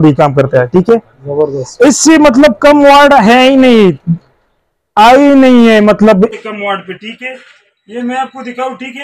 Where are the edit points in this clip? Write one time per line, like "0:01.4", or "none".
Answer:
none